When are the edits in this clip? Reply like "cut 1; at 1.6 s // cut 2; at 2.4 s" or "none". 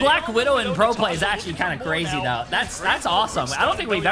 none